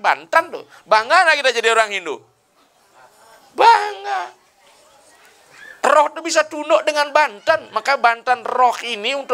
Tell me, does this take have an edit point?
no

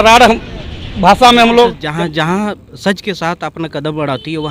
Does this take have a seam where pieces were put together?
yes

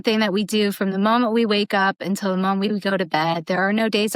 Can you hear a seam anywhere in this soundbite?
no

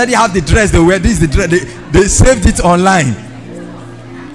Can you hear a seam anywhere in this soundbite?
no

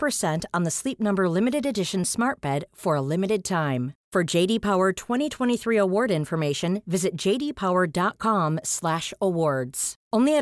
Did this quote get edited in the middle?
no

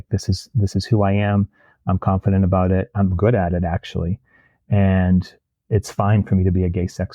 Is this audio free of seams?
no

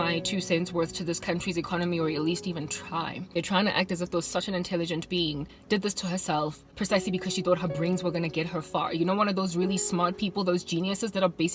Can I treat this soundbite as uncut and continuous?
no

